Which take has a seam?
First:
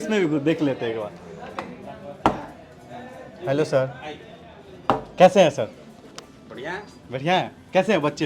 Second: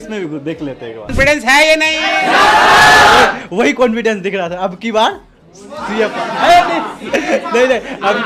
second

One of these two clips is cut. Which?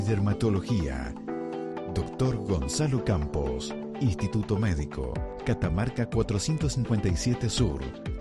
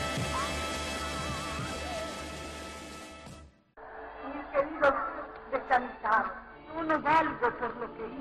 second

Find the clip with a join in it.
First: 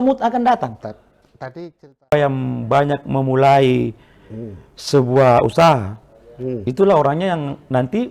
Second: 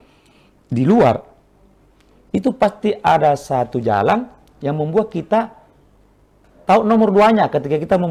first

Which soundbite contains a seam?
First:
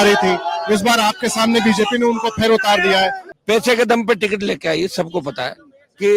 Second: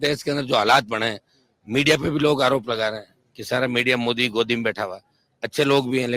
first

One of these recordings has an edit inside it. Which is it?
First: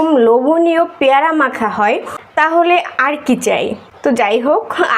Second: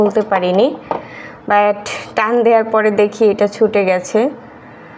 first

